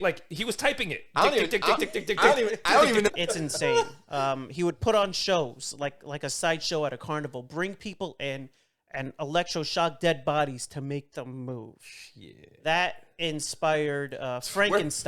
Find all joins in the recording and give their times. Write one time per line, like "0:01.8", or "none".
0:03.1